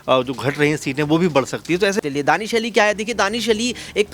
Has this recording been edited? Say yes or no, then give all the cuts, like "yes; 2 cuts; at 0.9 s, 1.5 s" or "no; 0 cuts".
yes; 1 cut; at 2.0 s